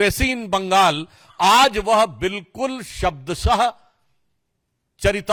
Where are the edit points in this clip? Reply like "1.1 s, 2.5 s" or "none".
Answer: none